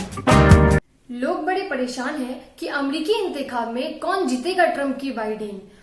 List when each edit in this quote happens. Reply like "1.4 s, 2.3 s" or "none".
0.9 s